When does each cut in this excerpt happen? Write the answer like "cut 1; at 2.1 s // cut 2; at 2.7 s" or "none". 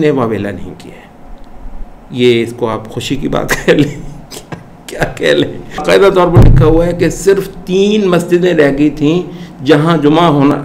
cut 1; at 5.8 s